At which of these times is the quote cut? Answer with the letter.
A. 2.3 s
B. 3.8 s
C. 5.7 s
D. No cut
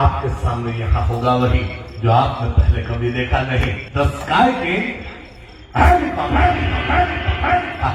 B